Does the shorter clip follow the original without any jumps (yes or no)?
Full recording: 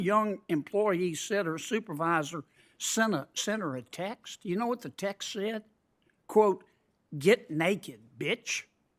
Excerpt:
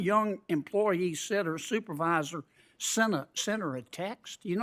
yes